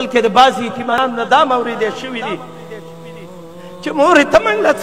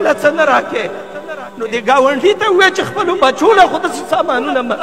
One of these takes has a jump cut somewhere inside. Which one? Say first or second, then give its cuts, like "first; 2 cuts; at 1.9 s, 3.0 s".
first; 1 cut; at 0.9 s